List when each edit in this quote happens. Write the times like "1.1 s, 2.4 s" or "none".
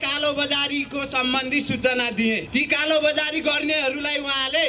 2.4 s